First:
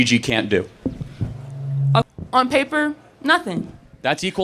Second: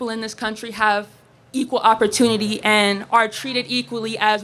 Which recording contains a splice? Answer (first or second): first